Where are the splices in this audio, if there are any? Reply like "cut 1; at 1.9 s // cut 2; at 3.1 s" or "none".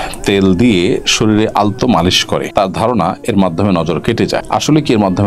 none